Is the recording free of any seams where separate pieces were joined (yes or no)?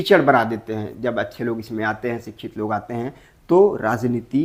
yes